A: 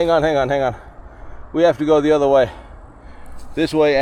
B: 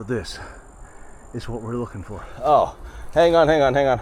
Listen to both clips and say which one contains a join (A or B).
B